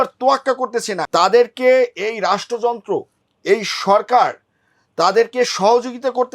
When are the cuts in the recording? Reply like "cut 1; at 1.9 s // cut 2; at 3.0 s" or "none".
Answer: cut 1; at 1.0 s